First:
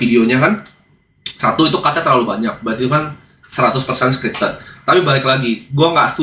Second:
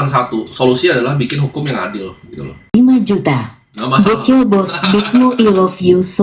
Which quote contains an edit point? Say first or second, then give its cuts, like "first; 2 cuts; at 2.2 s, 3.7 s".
second; 1 cut; at 2.7 s